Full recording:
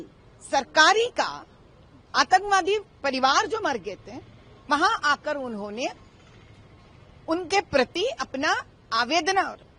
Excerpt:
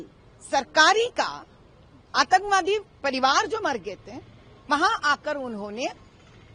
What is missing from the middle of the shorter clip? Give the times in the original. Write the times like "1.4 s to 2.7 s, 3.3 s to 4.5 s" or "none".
none